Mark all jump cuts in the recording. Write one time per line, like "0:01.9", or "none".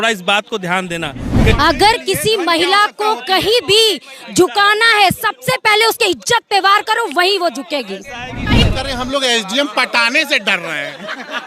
0:01.5
0:08.6